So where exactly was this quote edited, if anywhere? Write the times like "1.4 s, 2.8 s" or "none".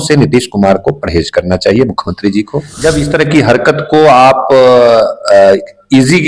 2.6 s